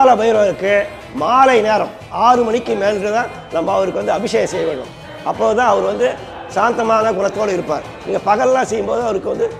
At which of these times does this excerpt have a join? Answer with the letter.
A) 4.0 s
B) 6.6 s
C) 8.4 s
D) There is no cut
D